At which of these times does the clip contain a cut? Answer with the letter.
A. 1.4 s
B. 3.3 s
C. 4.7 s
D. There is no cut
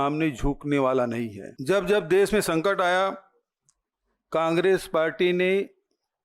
A